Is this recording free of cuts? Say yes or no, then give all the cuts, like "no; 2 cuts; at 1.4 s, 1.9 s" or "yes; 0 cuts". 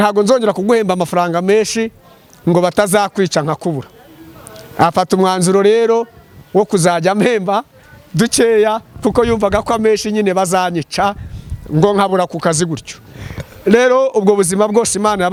yes; 0 cuts